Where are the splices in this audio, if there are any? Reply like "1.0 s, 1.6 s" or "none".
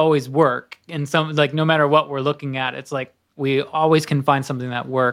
none